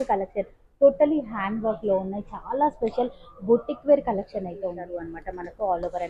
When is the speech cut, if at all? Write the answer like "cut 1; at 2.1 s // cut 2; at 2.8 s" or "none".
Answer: cut 1; at 4.9 s